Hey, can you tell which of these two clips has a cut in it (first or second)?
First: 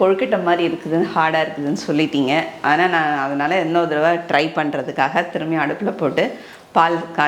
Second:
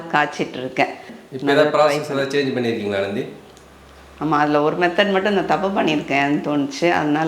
second